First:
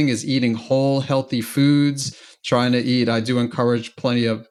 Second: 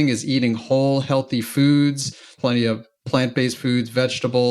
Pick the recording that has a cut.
second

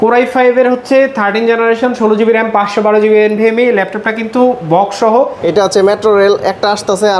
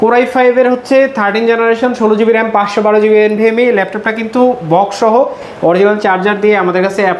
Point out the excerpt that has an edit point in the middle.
first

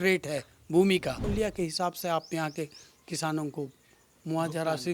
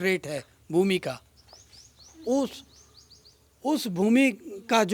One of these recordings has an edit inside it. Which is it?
first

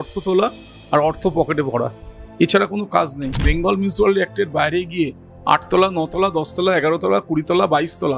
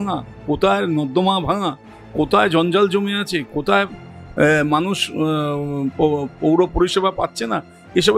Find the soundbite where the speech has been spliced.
first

